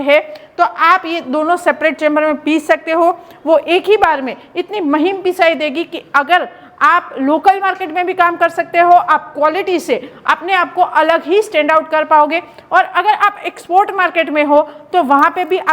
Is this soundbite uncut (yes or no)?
yes